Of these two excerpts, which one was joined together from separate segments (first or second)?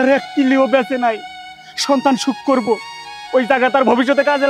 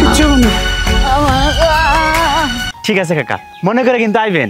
second